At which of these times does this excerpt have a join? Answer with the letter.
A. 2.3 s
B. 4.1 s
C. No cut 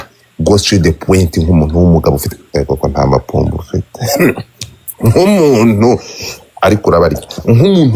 C